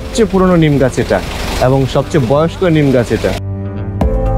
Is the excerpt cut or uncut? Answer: uncut